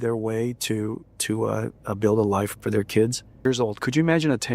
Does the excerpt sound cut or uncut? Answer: cut